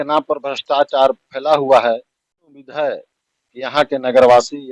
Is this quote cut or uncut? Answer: cut